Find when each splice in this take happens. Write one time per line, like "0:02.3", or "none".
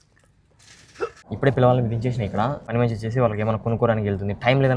0:01.2
0:02.6